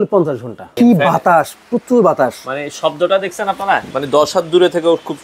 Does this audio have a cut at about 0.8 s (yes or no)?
yes